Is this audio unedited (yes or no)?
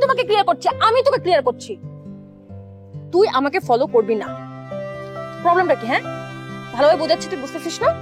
yes